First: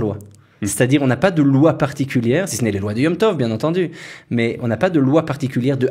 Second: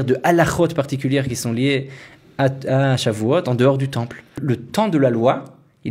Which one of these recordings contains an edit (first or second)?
second